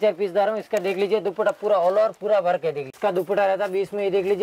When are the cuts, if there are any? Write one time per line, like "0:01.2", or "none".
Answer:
0:02.9